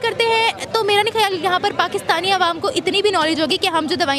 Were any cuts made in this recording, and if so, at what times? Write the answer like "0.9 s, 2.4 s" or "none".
none